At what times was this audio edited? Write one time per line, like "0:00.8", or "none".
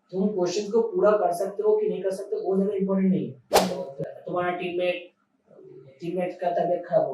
0:03.6